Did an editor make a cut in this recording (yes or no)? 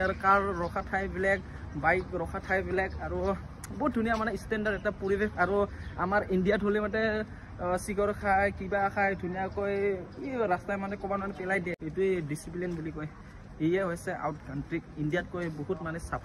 yes